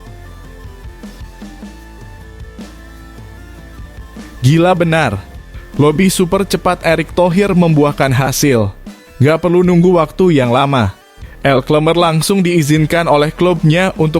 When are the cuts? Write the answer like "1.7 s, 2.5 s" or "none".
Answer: none